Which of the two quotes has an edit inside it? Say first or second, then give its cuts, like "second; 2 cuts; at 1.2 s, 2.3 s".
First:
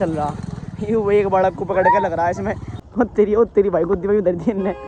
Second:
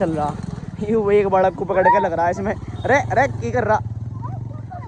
first; 1 cut; at 2.7 s